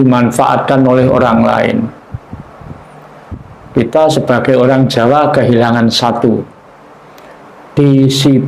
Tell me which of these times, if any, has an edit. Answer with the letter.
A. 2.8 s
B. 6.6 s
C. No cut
C